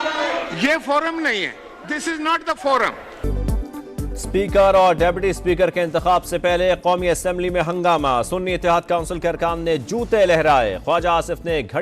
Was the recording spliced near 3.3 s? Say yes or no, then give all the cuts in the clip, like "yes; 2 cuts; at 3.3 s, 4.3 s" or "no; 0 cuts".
yes; 1 cut; at 3.3 s